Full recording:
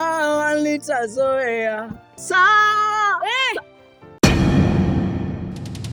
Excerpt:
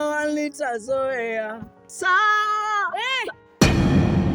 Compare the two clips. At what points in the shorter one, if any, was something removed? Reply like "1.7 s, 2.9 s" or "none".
3.4 s